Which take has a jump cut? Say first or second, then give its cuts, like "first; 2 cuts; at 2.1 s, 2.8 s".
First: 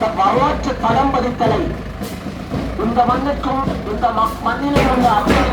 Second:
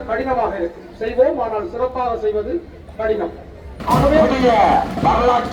second; 1 cut; at 4.3 s